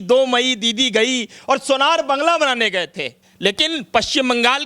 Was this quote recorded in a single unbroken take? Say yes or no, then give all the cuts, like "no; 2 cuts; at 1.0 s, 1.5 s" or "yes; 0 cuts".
no; 1 cut; at 3.2 s